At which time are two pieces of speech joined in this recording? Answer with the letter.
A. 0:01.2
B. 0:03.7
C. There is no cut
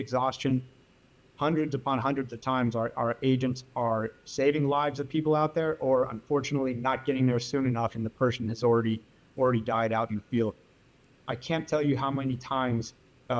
C